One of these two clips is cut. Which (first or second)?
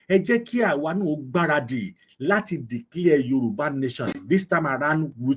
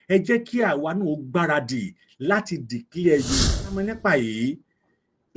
second